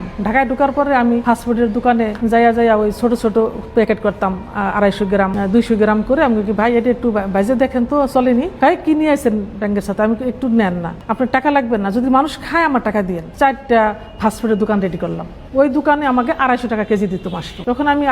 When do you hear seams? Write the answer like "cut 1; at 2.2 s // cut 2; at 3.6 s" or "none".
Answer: cut 1; at 1.2 s // cut 2; at 2.1 s // cut 3; at 5.3 s // cut 4; at 8.5 s // cut 5; at 10.9 s // cut 6; at 13.2 s